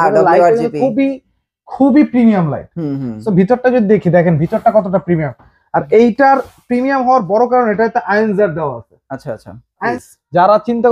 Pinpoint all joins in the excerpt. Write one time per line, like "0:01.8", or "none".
0:09.8